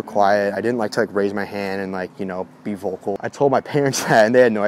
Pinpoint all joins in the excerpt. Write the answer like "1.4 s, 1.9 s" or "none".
3.1 s